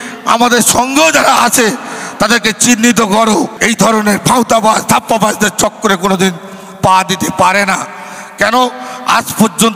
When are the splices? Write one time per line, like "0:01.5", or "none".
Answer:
0:03.6

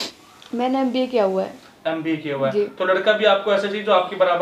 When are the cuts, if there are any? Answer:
none

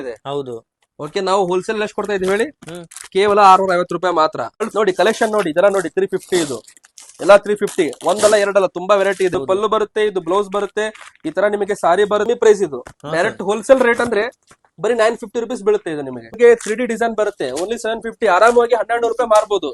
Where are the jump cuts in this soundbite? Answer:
0:04.6
0:09.3
0:12.3
0:16.3

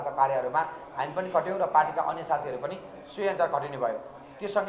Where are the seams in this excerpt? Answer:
none

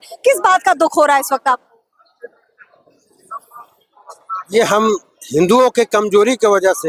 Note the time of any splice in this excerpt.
none

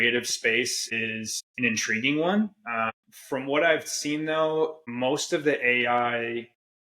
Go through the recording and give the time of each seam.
0:01.0
0:02.9
0:04.8

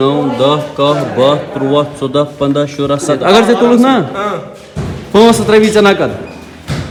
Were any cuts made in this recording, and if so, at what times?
none

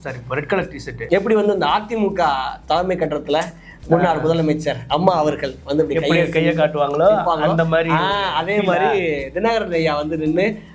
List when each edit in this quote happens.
0:01.0

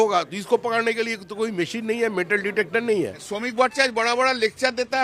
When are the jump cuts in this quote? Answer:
0:03.3

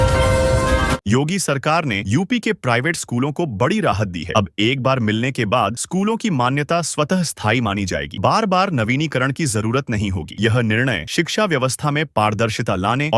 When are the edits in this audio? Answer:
0:00.9

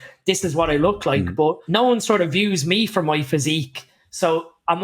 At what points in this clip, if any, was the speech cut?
0:01.6

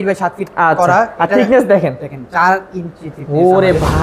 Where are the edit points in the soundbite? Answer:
none

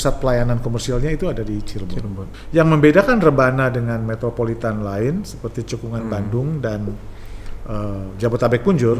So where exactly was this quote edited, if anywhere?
0:02.2

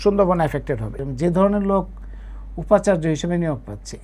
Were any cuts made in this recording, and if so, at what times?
0:01.0

